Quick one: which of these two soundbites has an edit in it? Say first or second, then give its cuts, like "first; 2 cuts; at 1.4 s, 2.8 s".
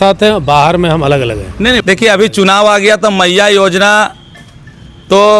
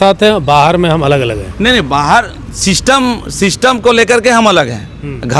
first; 1 cut; at 1.8 s